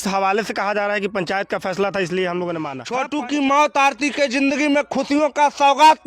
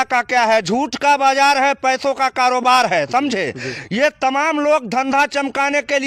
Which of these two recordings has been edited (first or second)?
first